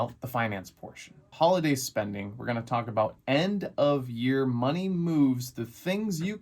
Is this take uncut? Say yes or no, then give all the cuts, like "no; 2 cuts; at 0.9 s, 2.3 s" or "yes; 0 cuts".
no; 1 cut; at 1.3 s